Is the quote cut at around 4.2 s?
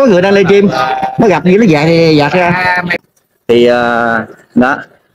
no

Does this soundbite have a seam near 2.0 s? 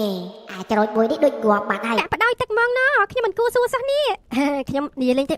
yes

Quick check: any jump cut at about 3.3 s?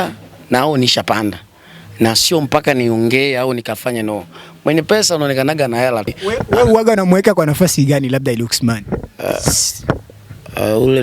no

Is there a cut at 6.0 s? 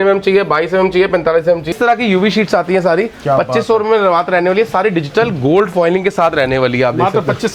no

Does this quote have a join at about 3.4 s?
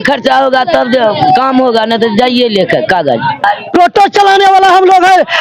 yes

